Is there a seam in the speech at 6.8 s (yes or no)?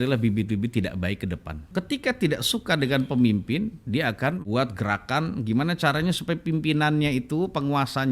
no